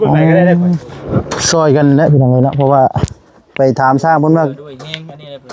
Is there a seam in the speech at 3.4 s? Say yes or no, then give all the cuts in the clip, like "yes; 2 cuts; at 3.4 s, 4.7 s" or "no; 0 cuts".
no; 1 cut; at 0.9 s